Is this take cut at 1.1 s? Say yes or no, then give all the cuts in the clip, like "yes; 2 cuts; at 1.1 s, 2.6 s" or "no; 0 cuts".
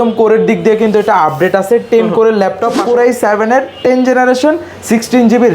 no; 1 cut; at 2.8 s